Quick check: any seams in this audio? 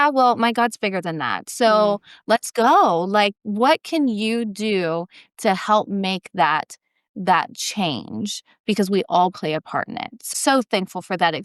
yes; 1 cut; at 10.3 s

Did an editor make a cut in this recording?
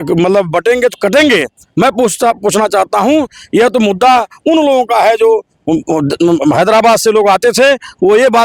no; 0 cuts

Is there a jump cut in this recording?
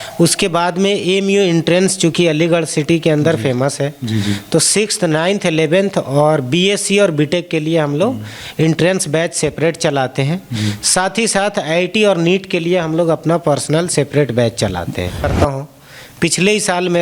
yes; 1 cut; at 15.3 s

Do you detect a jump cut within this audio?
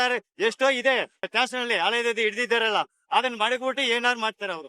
yes; 1 cut; at 1.3 s

